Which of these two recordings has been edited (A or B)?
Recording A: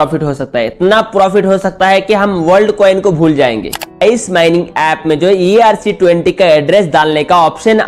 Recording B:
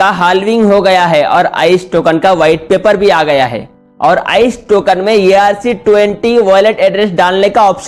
A